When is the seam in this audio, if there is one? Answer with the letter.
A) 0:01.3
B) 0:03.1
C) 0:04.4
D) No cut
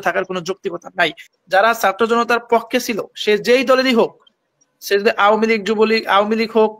A